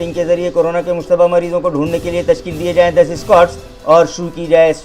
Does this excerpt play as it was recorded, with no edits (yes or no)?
yes